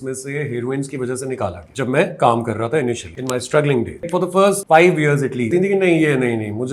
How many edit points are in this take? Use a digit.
4